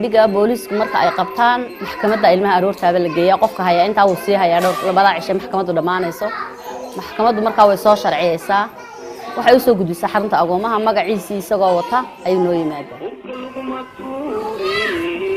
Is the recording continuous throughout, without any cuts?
yes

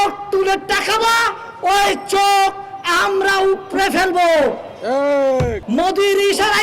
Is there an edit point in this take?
yes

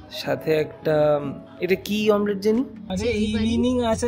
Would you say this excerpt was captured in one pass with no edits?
no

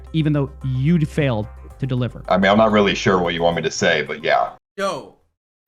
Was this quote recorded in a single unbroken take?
no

